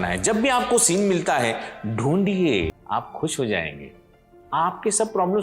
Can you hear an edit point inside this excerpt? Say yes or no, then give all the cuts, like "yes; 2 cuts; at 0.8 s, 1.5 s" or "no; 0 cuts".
yes; 1 cut; at 2.8 s